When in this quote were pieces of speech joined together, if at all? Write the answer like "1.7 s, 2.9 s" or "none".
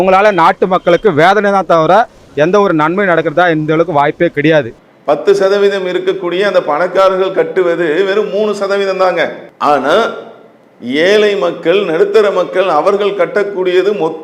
4.8 s, 9.5 s